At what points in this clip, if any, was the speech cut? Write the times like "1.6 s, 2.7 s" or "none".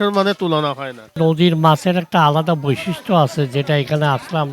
1.2 s